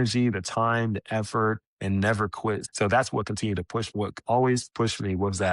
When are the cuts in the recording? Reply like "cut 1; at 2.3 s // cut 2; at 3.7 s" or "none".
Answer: cut 1; at 2.7 s // cut 2; at 3.9 s